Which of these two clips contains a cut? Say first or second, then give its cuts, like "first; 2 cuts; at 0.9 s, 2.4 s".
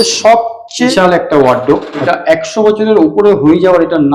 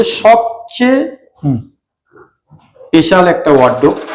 first; 2 cuts; at 0.9 s, 2.0 s